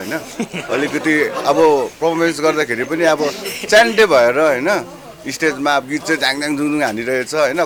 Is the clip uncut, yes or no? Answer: yes